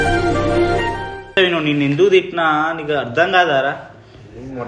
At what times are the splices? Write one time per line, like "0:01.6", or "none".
0:01.3